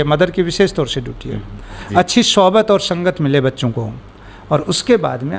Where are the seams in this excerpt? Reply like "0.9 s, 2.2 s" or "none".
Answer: 1.8 s